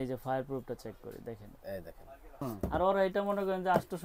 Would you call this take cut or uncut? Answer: cut